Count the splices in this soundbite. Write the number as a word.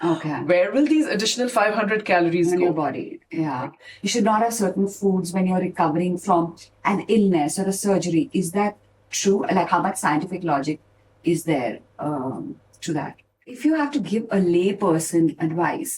two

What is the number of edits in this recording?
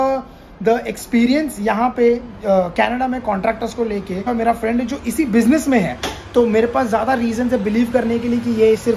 one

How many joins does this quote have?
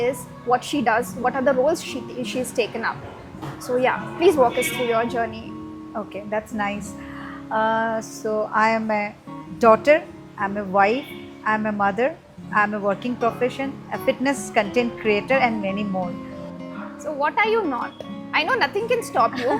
zero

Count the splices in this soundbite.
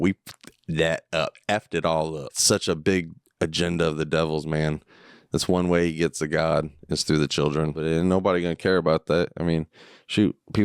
two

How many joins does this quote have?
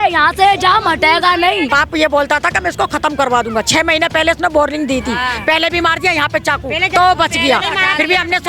one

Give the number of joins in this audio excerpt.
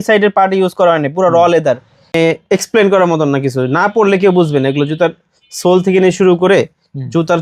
one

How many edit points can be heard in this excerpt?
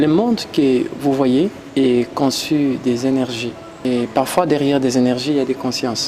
two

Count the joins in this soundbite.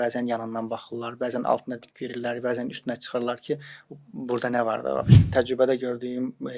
one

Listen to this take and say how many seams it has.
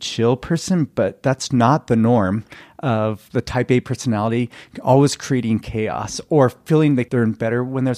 one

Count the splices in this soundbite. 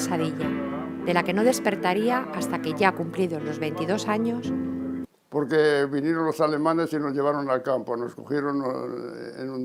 zero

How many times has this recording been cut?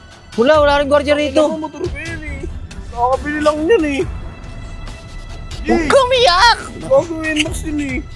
zero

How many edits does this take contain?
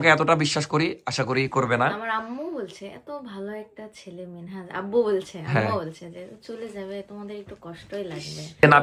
zero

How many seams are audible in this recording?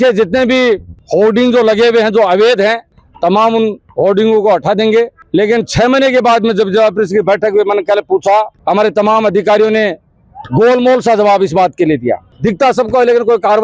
three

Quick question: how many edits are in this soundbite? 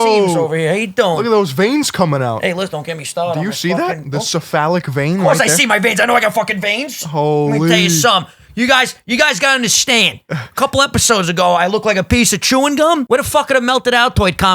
one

